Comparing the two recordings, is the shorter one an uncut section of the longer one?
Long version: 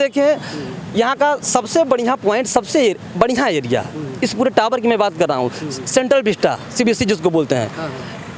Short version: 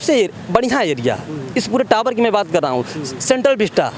yes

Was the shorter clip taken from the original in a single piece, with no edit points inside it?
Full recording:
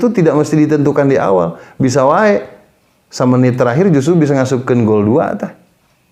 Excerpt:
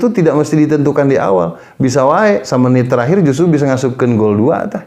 no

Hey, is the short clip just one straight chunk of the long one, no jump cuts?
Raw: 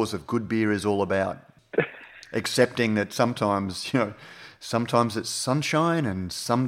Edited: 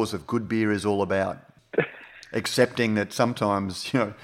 yes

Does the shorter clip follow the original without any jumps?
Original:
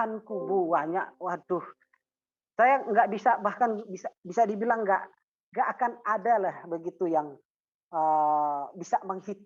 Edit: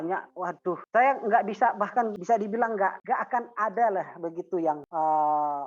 no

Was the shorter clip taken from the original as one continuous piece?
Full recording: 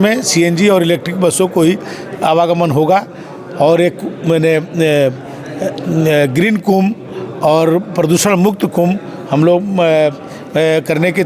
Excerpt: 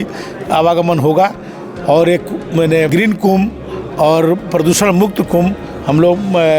no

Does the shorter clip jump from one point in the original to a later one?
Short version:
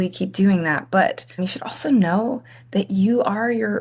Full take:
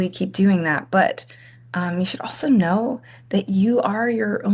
yes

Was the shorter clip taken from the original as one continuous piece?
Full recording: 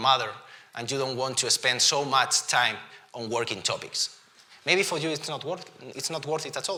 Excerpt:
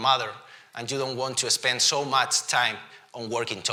yes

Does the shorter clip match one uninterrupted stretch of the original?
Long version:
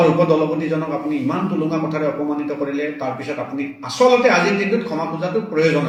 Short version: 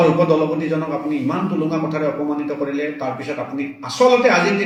yes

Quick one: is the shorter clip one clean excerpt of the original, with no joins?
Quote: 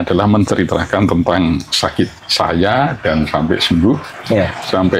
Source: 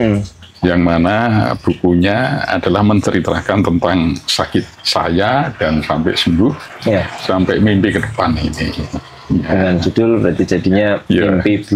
yes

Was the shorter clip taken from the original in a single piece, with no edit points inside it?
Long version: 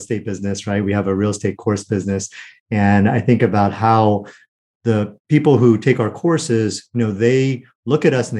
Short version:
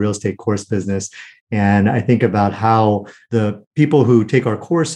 no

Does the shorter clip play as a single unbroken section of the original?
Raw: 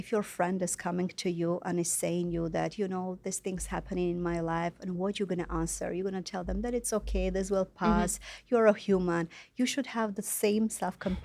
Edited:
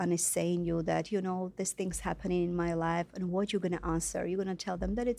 yes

